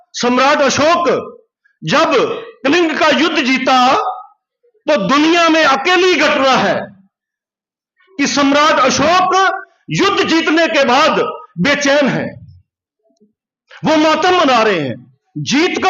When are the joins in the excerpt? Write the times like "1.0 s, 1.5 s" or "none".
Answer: none